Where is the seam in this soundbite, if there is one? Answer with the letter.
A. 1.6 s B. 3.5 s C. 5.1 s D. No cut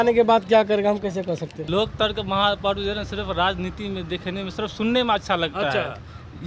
A